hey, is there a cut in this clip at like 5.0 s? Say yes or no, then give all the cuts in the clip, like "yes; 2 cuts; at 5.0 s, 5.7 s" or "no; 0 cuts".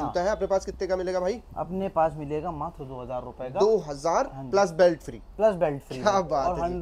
no; 0 cuts